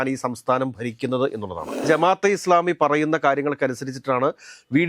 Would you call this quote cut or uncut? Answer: cut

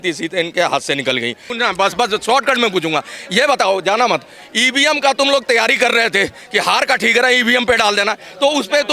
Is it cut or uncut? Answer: cut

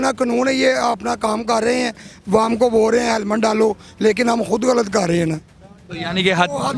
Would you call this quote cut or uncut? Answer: uncut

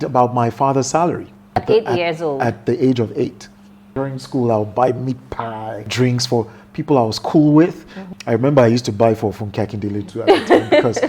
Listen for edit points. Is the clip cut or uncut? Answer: cut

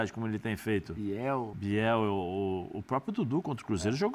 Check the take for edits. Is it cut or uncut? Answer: cut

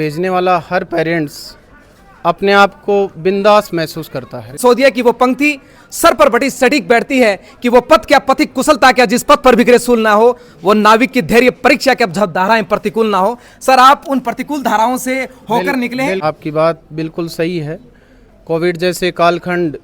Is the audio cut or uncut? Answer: cut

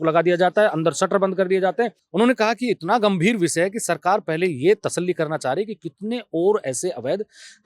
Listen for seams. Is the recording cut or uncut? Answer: cut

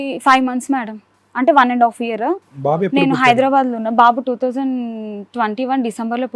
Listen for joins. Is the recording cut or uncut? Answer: uncut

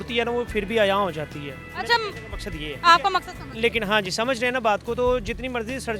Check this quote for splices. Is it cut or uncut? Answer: uncut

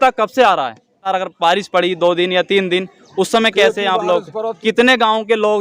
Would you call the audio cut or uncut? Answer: cut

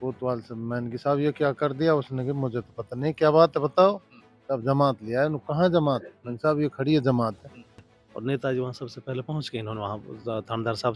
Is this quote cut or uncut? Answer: cut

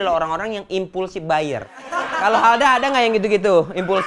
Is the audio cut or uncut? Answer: cut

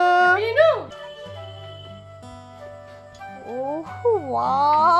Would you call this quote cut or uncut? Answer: cut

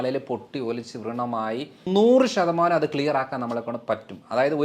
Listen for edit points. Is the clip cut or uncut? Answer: cut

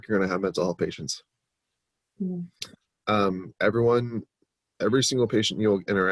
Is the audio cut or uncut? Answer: uncut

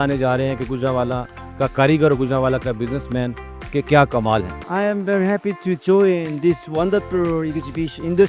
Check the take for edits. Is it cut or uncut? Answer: cut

